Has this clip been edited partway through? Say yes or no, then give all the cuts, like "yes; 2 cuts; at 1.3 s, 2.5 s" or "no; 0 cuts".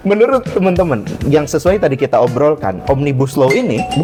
no; 0 cuts